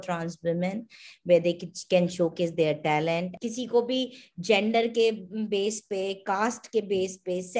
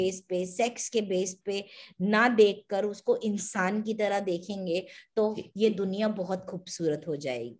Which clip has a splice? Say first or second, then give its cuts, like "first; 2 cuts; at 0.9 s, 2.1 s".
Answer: first; 1 cut; at 3.4 s